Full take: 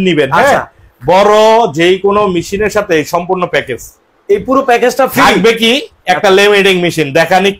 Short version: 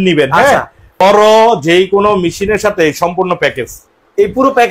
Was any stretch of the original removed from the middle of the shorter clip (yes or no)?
yes